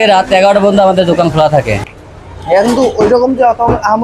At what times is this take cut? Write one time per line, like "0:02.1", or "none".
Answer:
0:01.9

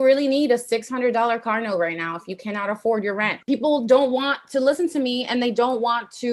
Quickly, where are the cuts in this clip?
0:03.3

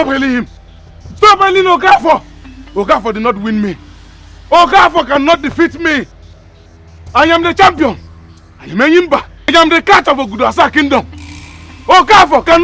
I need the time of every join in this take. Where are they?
0:09.5

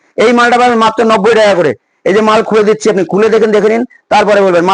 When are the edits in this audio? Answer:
none

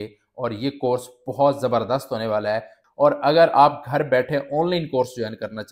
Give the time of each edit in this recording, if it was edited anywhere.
0:02.8

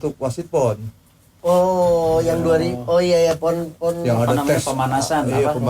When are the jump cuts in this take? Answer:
none

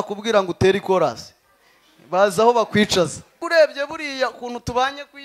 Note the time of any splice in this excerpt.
0:03.4

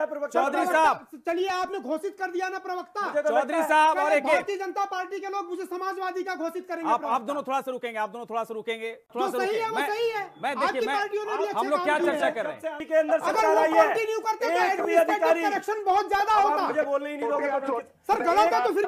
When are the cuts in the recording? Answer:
0:09.1
0:12.8

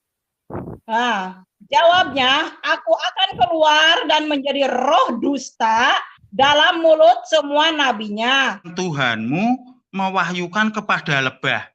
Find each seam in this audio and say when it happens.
0:08.7

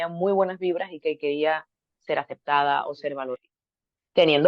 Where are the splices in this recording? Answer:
0:03.3

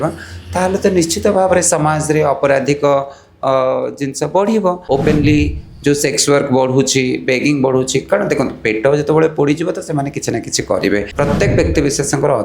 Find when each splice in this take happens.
0:04.8
0:11.1

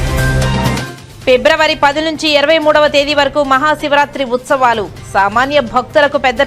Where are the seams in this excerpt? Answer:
0:01.0

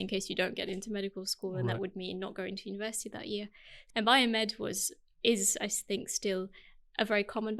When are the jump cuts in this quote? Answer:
0:03.8

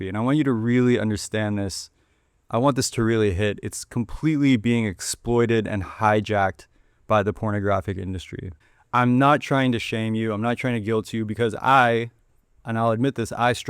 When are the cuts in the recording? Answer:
0:08.6

